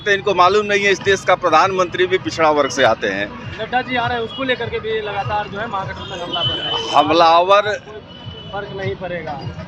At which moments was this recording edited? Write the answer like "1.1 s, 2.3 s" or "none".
none